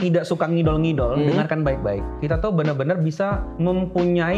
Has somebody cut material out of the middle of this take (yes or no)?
yes